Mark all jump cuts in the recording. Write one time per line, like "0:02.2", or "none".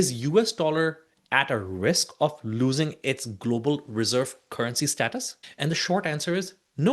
0:05.4